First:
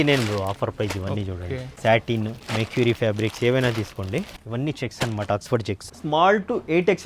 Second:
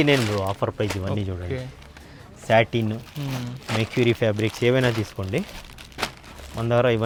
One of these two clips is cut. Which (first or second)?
first